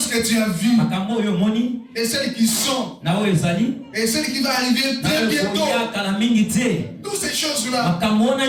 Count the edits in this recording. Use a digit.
0